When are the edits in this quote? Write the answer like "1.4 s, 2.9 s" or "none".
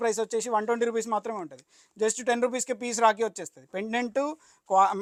none